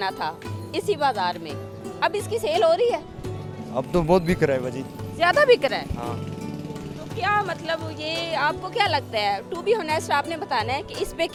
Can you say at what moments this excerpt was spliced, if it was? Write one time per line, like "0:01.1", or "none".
none